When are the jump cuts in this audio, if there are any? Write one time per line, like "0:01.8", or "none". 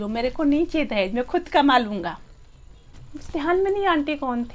none